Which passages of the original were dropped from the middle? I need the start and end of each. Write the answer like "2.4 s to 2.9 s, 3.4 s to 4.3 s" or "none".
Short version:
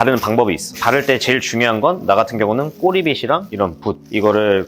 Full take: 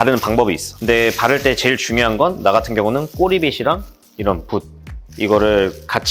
0.8 s to 1.2 s, 4.1 s to 4.8 s